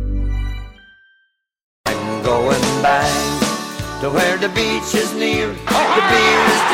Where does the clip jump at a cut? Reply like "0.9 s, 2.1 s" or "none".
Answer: 1.6 s